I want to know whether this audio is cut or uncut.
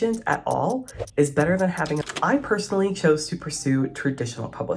cut